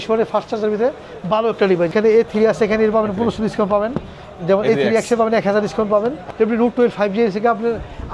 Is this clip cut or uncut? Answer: cut